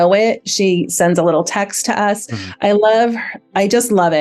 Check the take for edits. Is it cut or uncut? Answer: uncut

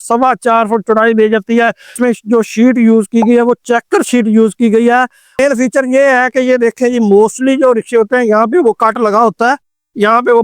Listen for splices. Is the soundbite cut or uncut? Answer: cut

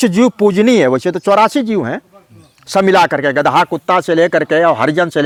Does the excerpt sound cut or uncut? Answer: uncut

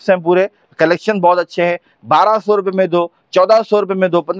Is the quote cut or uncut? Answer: uncut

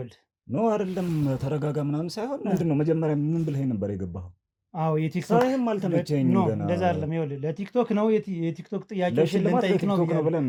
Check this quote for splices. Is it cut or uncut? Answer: uncut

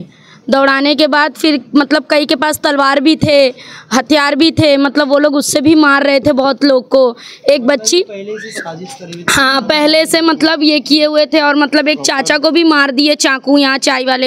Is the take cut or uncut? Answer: uncut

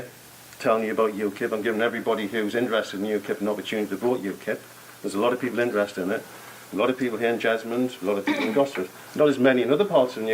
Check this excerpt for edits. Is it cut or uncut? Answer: uncut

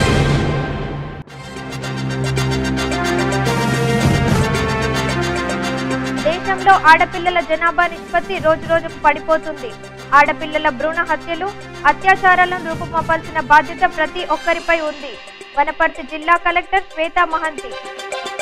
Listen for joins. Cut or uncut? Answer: cut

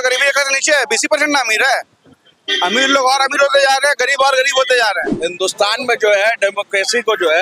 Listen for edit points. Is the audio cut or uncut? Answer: cut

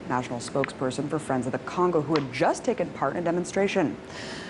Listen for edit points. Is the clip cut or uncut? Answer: uncut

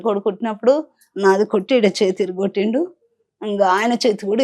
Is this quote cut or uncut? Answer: uncut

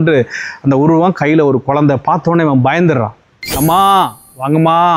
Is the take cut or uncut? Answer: cut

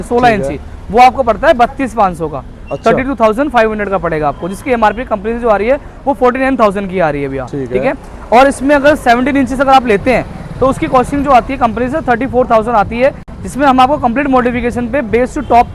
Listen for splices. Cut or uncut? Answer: uncut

